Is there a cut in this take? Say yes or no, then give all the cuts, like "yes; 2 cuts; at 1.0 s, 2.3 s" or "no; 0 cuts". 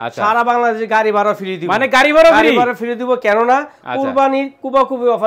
no; 0 cuts